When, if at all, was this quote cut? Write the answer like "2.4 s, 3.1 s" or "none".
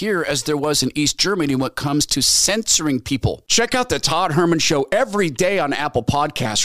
none